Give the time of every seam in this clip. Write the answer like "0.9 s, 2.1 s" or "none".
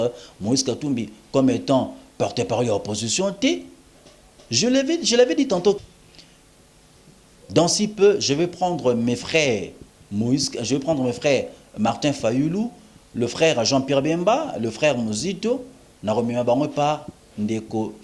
5.8 s